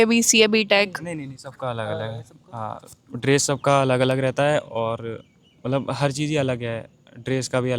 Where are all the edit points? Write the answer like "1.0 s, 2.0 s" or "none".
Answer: none